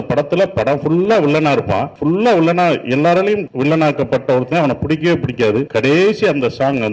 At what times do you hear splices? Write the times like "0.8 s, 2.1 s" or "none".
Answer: 1.9 s, 3.5 s, 5.7 s

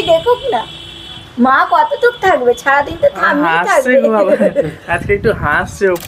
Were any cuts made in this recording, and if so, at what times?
none

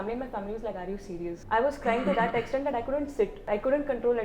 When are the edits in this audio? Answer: 1.4 s, 3.4 s

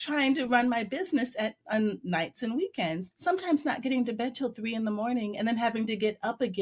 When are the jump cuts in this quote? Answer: 3.1 s

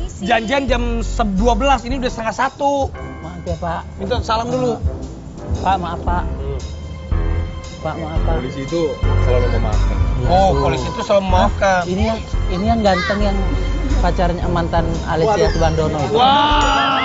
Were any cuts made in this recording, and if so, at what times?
none

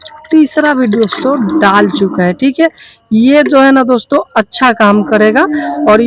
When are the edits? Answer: none

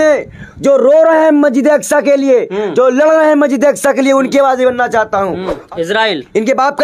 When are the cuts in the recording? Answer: 5.5 s

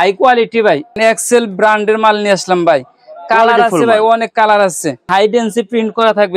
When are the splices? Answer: 1.0 s, 5.1 s

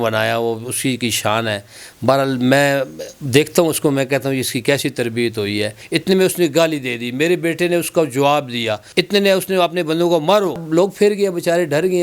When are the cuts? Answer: 5.8 s, 8.8 s, 10.6 s

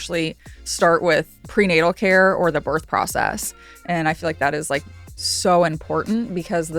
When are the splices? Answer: 1.4 s

